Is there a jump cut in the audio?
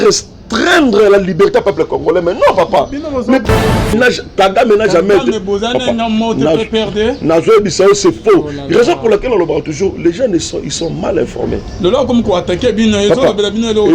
yes; 1 cut; at 3.5 s

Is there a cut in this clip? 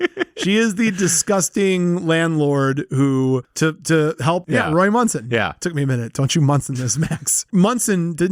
yes; 2 cuts; at 4.4 s, 7.4 s

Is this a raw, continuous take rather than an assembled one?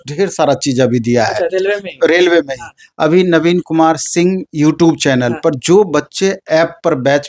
yes; 0 cuts

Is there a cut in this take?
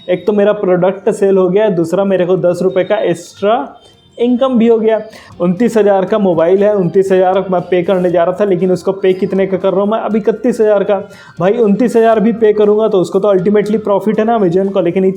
yes; 1 cut; at 5.2 s

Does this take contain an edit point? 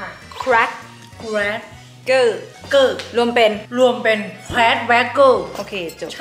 no; 0 cuts

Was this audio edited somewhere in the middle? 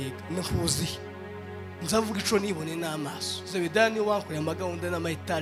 no; 0 cuts

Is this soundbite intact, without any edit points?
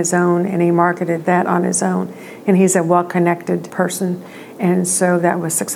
no; 2 cuts; at 1.2 s, 3.7 s

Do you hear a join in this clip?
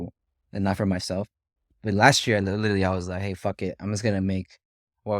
yes; 1 cut; at 1.6 s

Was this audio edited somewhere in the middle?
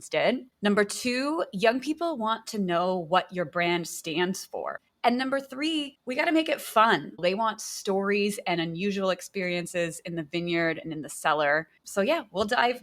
yes; 2 cuts; at 4.8 s, 7.2 s

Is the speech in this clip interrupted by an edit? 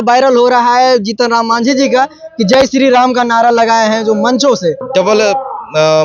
yes; 1 cut; at 4.8 s

